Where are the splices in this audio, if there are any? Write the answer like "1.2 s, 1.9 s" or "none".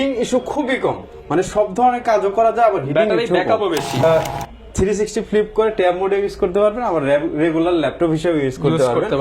4.0 s